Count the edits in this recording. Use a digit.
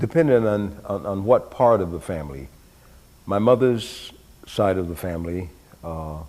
1